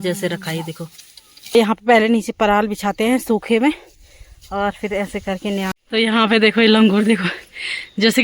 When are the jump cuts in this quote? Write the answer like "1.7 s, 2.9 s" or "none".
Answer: 1.6 s, 5.7 s